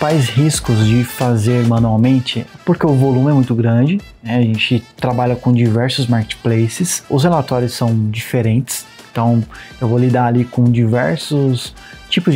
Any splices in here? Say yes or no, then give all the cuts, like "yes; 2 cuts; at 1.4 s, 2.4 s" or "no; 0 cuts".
no; 0 cuts